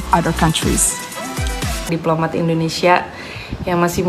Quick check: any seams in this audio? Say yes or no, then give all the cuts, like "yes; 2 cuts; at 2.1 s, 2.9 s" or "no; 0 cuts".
yes; 1 cut; at 1.9 s